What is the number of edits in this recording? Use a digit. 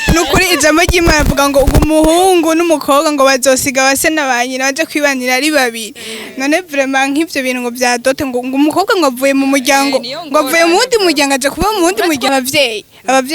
1